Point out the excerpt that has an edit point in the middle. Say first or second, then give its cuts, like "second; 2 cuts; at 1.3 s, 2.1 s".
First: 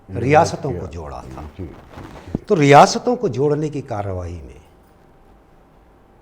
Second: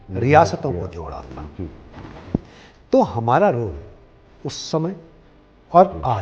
second; 1 cut; at 2.4 s